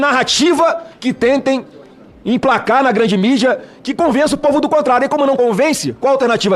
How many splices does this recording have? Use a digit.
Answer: 0